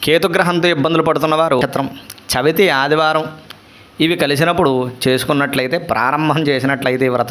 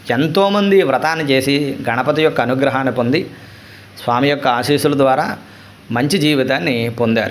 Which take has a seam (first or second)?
first